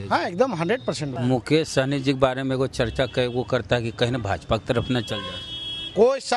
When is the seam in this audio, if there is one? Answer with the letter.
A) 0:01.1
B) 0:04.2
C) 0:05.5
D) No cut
A